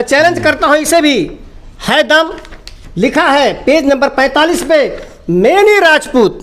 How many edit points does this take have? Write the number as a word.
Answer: zero